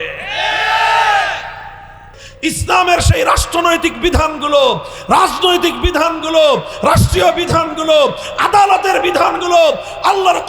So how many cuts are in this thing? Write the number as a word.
one